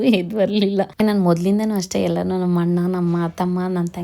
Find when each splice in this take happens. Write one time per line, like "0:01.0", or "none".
0:01.0